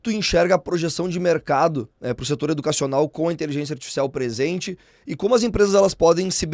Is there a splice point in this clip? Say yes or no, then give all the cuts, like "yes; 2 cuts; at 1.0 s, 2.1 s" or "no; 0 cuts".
no; 0 cuts